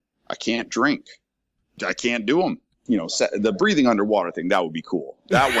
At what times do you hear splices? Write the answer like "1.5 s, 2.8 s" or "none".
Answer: 1.5 s, 2.7 s